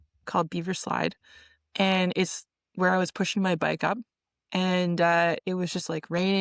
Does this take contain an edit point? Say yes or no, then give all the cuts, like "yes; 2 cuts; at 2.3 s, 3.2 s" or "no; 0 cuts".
no; 0 cuts